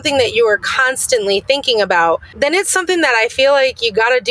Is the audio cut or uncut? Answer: cut